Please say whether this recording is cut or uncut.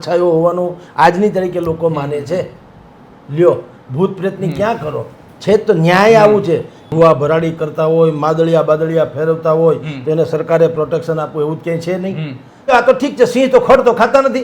cut